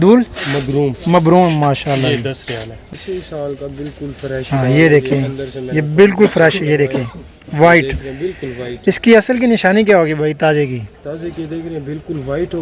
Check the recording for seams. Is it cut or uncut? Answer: cut